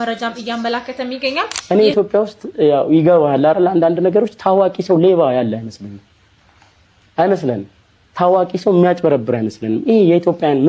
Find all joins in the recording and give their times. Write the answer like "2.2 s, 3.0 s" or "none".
1.6 s

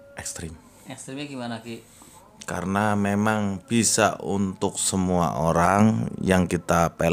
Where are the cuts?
none

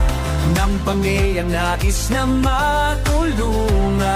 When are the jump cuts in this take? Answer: none

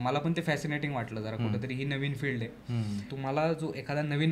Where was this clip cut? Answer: 3.1 s

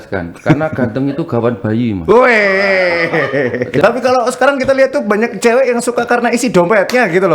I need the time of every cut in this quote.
3.8 s

